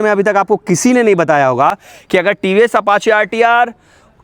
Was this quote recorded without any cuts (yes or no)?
yes